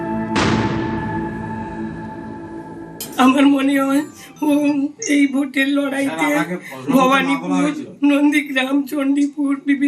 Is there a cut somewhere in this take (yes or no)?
yes